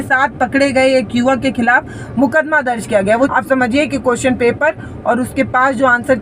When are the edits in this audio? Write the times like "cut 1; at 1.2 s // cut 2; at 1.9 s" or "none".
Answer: cut 1; at 3.1 s